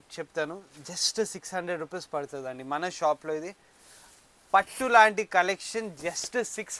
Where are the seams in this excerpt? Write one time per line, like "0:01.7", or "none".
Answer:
none